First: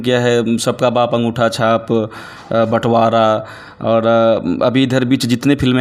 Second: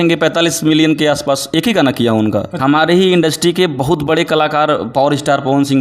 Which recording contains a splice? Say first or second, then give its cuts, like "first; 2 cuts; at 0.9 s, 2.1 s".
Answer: second; 1 cut; at 2.5 s